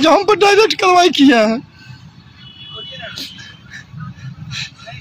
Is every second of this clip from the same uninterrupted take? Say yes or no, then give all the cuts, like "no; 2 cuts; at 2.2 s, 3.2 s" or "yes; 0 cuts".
yes; 0 cuts